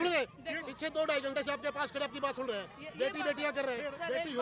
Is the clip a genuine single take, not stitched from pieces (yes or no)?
yes